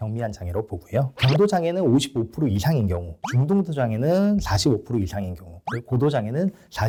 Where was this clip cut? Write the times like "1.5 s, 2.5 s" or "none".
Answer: none